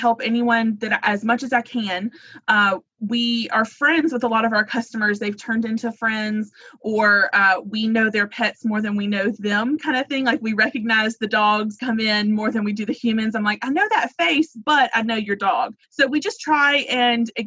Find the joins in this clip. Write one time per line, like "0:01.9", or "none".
0:11.8
0:15.8